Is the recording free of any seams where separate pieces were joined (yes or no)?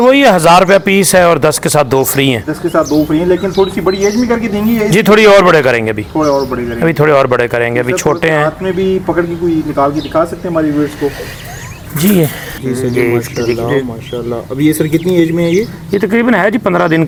yes